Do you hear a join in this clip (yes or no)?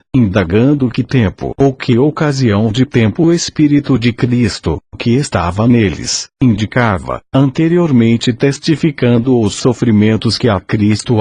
yes